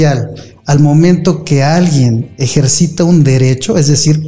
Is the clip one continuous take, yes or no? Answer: yes